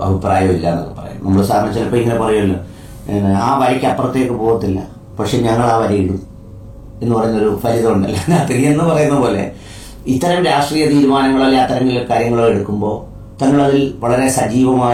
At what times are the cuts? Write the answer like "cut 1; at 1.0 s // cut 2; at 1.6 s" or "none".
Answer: none